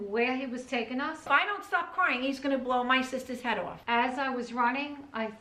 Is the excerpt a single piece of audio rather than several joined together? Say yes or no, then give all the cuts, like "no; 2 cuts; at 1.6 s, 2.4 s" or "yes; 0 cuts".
no; 2 cuts; at 1.3 s, 3.7 s